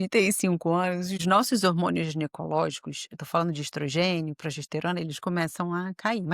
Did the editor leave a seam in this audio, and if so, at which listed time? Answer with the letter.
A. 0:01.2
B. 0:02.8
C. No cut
A